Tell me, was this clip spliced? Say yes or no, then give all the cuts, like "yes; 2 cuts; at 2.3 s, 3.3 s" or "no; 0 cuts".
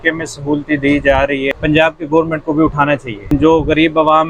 yes; 2 cuts; at 1.5 s, 3.3 s